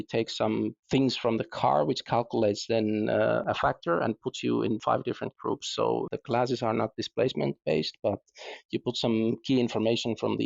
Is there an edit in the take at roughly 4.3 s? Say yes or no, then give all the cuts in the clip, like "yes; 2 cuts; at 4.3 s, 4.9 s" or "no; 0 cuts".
no; 0 cuts